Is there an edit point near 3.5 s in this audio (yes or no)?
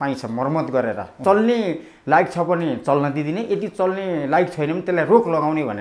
no